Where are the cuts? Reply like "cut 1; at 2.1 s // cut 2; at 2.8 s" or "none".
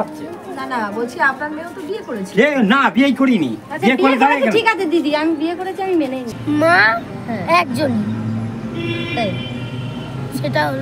cut 1; at 6.2 s